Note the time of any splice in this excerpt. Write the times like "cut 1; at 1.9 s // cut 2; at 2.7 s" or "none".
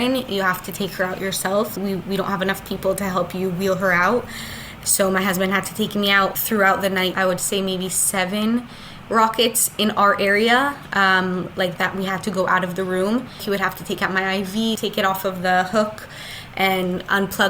cut 1; at 1.7 s // cut 2; at 6.3 s // cut 3; at 7.1 s // cut 4; at 13.4 s // cut 5; at 14.8 s

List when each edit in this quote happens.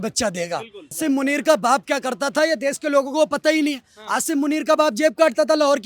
cut 1; at 1.0 s

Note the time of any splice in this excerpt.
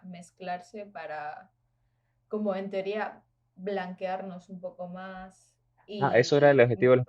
cut 1; at 6.0 s

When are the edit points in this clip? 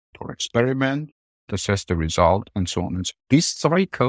cut 1; at 3.1 s

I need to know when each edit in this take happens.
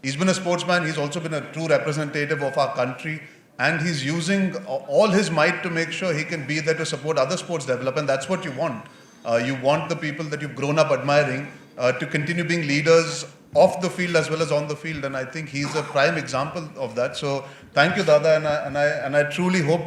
none

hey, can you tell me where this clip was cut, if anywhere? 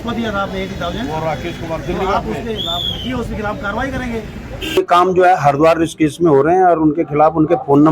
cut 1; at 4.8 s

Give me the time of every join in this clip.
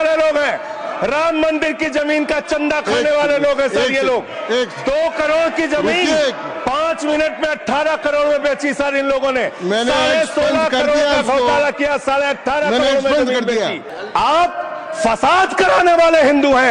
cut 1; at 13.9 s

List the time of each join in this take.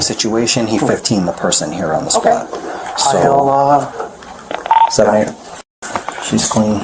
cut 1; at 4.6 s

